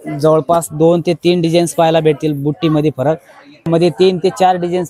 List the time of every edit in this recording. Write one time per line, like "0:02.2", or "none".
0:03.7